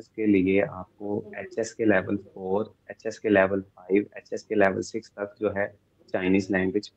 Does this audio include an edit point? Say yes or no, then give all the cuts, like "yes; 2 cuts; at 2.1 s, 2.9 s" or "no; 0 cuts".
no; 0 cuts